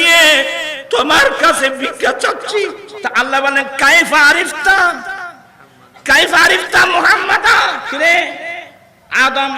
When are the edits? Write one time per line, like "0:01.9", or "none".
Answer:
0:02.9
0:07.9